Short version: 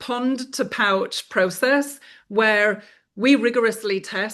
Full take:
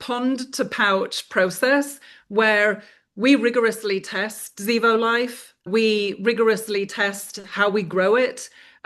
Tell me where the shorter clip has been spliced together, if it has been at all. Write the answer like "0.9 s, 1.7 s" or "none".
none

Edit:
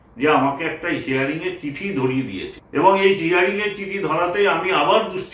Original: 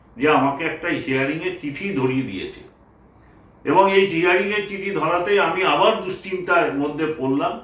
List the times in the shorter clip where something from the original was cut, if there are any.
2.6 s

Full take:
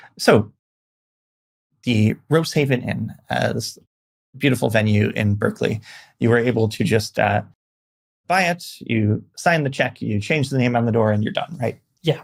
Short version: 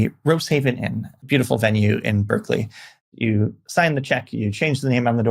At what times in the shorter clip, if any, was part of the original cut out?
1.1 s, 3.0 s

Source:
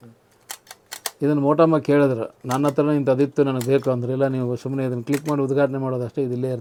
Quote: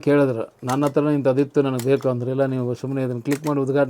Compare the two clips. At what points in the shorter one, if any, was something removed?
none

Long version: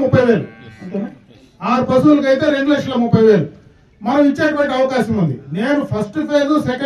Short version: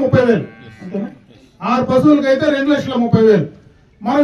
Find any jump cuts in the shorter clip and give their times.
none

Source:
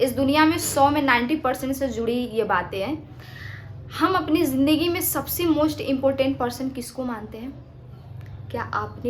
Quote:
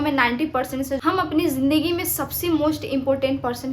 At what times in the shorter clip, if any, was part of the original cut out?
1.0 s

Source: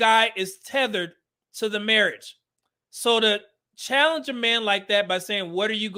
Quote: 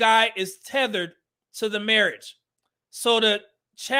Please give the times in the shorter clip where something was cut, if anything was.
none

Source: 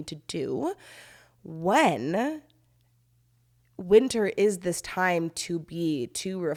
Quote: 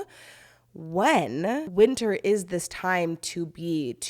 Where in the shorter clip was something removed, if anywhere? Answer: 1.7 s

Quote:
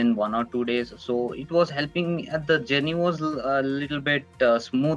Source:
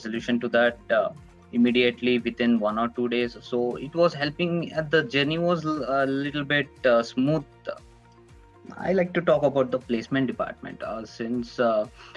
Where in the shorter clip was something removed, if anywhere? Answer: none

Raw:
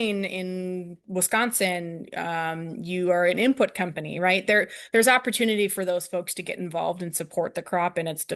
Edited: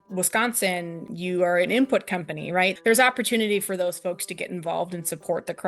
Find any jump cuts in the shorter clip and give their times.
1.0 s, 2.7 s

